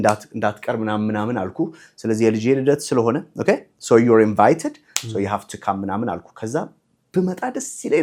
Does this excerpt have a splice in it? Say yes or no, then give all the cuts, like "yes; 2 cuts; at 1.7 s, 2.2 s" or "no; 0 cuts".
no; 0 cuts